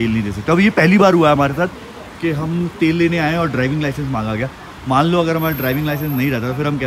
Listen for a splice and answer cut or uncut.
uncut